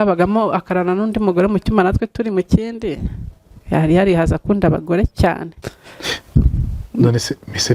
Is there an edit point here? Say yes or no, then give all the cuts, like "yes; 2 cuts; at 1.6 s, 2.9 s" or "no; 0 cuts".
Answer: yes; 1 cut; at 5.6 s